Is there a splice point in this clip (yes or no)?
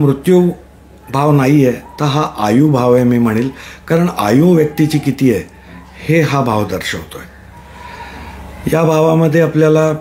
no